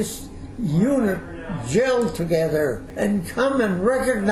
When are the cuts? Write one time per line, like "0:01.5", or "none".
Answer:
0:02.8